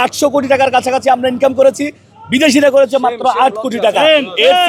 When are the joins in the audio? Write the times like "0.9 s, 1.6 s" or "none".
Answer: none